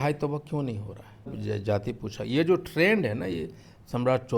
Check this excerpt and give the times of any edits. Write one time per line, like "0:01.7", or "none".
0:01.4